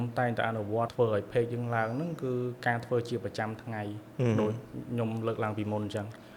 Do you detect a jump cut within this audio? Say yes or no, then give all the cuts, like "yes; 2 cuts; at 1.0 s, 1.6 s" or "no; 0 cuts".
yes; 1 cut; at 0.9 s